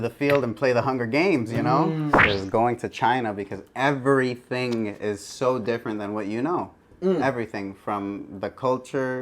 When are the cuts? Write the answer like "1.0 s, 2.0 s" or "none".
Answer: 2.1 s

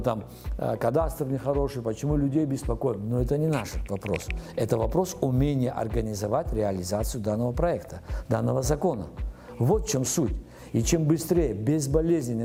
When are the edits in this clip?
none

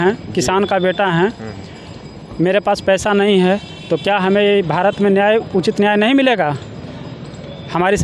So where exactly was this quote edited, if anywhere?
none

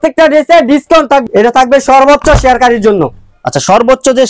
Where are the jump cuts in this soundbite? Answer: 1.2 s

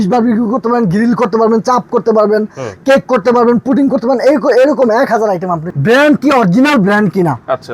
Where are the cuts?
5.7 s

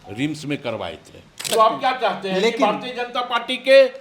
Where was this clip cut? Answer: 1.5 s

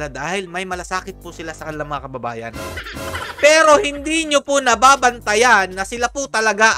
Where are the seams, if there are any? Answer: none

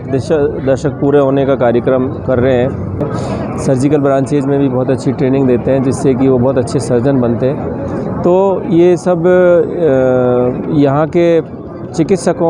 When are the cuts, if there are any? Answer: 3.1 s

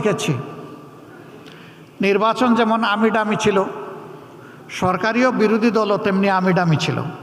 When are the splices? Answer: none

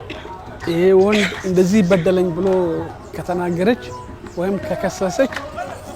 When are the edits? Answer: 3.0 s

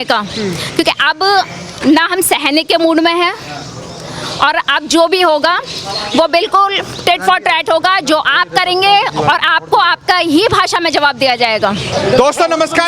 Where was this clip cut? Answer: none

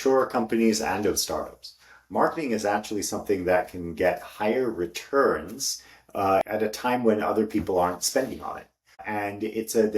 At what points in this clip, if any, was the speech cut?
6.4 s

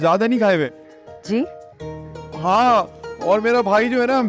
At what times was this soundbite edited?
none

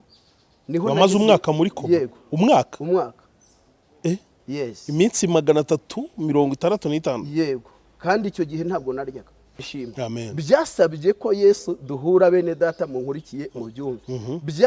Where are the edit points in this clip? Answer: 9.7 s

